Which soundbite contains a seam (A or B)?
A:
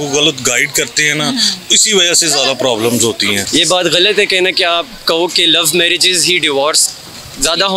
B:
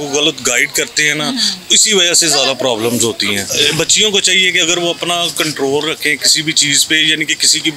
A